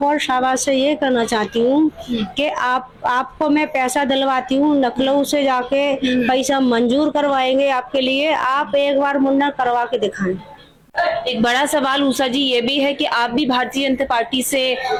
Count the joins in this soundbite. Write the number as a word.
zero